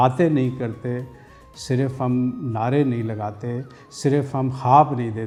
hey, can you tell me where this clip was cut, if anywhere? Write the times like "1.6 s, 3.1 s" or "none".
none